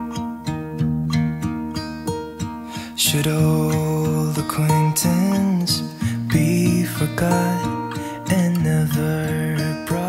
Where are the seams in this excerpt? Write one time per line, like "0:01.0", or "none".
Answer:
none